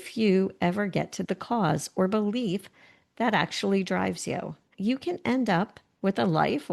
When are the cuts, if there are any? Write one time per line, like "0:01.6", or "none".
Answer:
0:01.2
0:04.7